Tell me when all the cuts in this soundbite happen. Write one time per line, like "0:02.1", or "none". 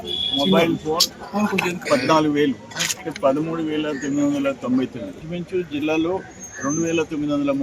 0:01.8
0:05.2